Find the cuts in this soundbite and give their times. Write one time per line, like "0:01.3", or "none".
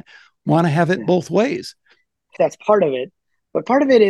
0:02.3